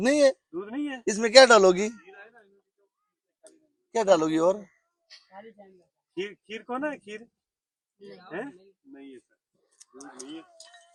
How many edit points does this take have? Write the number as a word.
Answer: zero